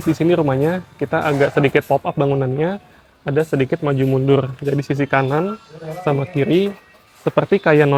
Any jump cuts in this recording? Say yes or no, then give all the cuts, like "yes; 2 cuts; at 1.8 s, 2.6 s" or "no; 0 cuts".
no; 0 cuts